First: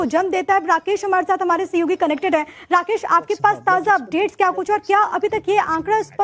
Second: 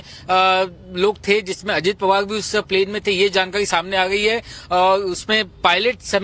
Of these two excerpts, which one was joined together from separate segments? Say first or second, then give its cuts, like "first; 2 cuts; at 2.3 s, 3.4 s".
second; 1 cut; at 5.2 s